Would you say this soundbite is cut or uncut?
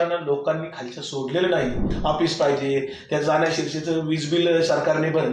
cut